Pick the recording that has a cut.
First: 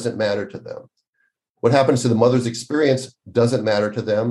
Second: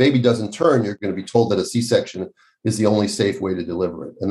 second; 1 cut; at 0.9 s

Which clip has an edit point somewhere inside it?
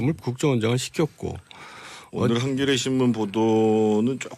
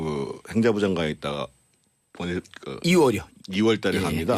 first; 1 cut; at 3.3 s

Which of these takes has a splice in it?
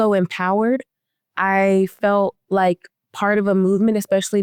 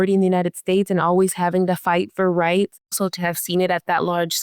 second; 1 cut; at 2.9 s

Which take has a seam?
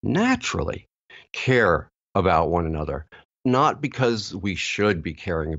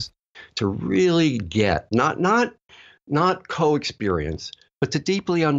first; 1 cut; at 3.2 s

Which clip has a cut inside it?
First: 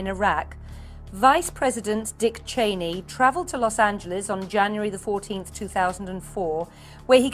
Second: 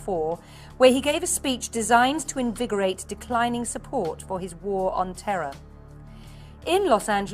second; 1 cut; at 2.8 s

